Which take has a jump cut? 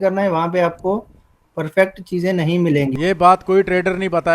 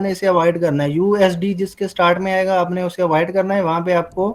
first; 1 cut; at 2.9 s

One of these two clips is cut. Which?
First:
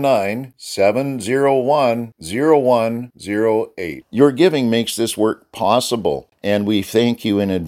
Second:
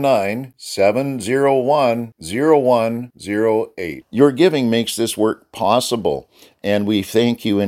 first; 1 cut; at 6.3 s

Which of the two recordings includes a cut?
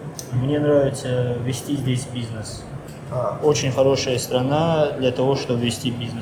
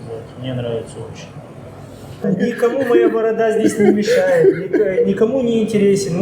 second; 1 cut; at 2.3 s

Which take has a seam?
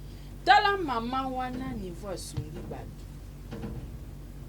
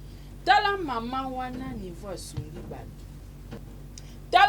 second; 1 cut; at 3.6 s

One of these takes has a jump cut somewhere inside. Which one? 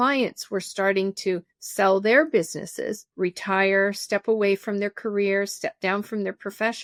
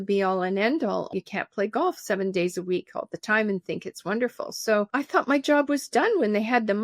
second; 2 cuts; at 1.1 s, 4.9 s

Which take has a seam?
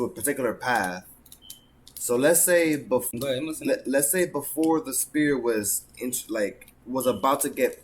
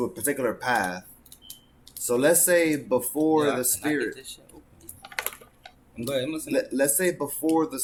first; 1 cut; at 3.1 s

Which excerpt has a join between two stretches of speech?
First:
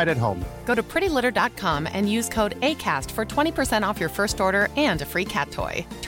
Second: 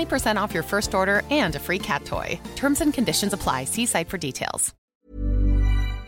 second; 1 cut; at 4.7 s

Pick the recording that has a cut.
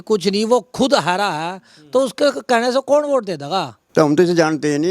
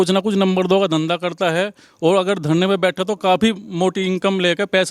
first; 1 cut; at 3.8 s

